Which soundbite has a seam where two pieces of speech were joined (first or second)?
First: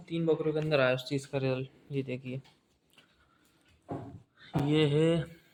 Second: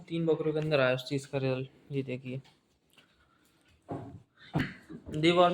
second